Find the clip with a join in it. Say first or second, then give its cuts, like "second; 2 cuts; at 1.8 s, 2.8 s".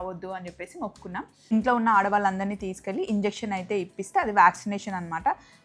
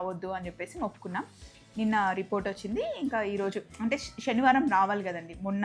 first; 1 cut; at 1.5 s